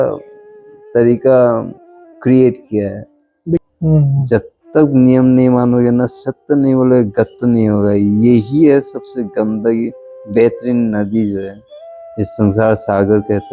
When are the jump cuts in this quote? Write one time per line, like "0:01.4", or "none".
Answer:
0:03.6